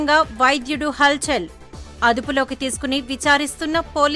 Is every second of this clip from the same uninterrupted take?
yes; 0 cuts

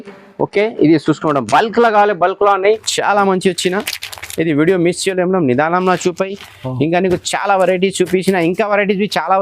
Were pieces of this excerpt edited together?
yes; 1 cut; at 2.9 s

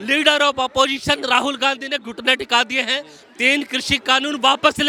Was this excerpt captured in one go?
yes; 0 cuts

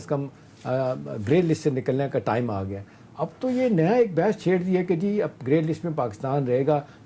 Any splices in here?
no; 0 cuts

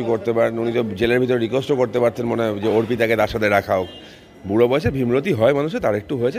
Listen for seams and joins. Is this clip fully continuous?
yes; 0 cuts

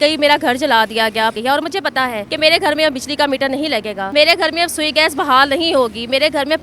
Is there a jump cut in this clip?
yes; 3 cuts; at 1.3 s, 2.3 s, 4.0 s

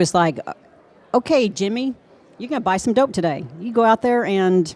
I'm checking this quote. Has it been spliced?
no; 0 cuts

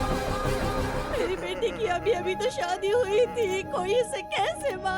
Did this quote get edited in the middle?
yes; 1 cut; at 1.0 s

